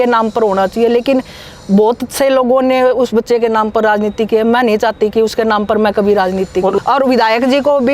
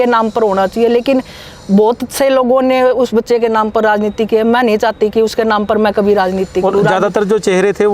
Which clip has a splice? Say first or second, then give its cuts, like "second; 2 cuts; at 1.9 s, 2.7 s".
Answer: first; 1 cut; at 6.8 s